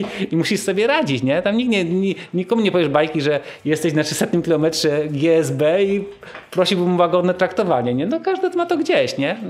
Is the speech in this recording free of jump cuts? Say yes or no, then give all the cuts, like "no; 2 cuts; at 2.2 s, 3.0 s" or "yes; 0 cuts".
yes; 0 cuts